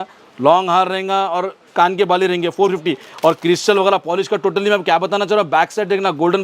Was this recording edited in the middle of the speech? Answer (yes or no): no